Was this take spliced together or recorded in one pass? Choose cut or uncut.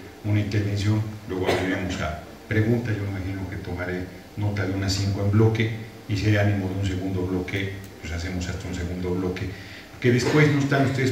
cut